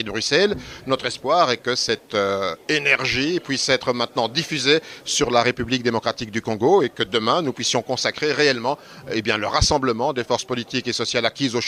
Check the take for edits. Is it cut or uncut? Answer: uncut